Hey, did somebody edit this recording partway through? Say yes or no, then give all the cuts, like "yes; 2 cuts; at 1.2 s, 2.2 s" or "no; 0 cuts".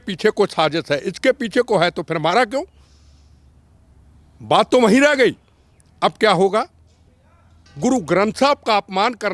no; 0 cuts